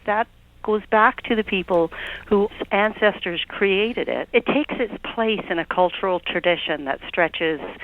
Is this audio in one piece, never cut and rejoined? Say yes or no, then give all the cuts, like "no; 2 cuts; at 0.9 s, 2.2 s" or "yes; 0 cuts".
no; 2 cuts; at 2.6 s, 4.2 s